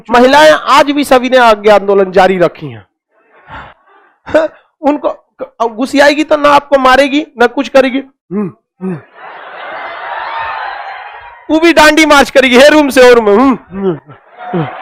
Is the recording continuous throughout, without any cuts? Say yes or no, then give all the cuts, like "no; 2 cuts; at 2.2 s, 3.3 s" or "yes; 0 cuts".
yes; 0 cuts